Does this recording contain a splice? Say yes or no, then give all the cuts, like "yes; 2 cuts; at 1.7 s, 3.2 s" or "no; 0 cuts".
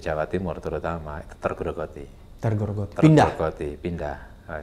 no; 0 cuts